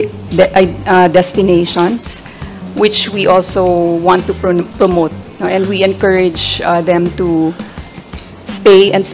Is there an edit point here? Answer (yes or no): no